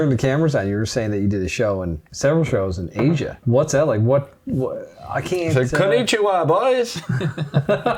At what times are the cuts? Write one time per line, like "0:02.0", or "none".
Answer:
0:02.0
0:03.4

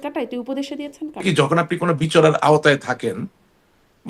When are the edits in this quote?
0:01.2

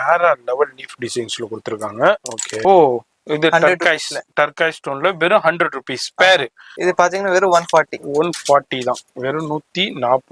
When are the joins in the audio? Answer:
0:02.5
0:06.7

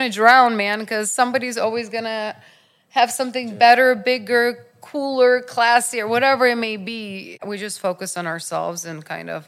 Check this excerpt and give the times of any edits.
0:07.4

